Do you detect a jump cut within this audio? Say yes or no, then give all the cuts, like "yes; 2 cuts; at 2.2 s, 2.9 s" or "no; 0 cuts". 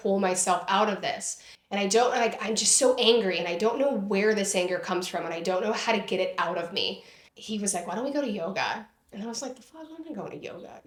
no; 0 cuts